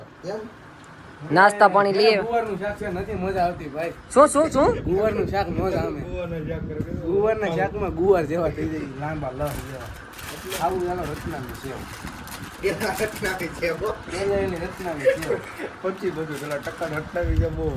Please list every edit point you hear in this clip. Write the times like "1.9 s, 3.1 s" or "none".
none